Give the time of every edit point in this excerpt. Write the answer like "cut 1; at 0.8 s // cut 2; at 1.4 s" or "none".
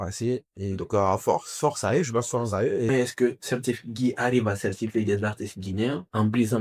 cut 1; at 2.9 s